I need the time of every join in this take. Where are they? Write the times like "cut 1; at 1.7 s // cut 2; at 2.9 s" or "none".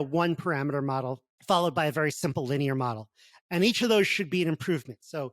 cut 1; at 1.3 s